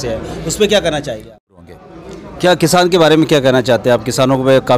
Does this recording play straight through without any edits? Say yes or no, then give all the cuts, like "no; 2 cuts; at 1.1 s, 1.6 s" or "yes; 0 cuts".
no; 1 cut; at 1.5 s